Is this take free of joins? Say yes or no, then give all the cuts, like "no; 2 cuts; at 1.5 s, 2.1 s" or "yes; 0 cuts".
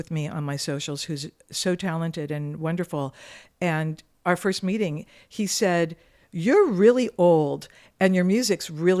yes; 0 cuts